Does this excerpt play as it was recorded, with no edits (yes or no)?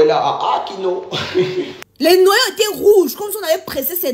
no